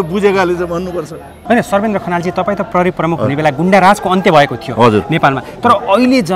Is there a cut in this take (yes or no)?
yes